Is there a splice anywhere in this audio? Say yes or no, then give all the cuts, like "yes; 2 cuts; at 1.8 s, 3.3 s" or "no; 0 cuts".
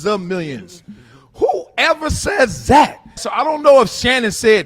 yes; 1 cut; at 3.3 s